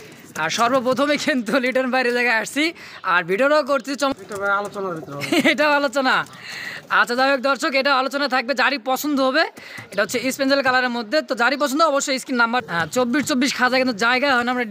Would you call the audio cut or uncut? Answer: cut